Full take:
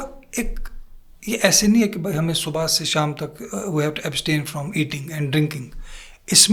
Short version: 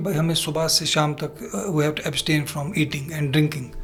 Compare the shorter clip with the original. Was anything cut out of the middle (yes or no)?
no